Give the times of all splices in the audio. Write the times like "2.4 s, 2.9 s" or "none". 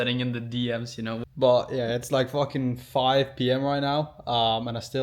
none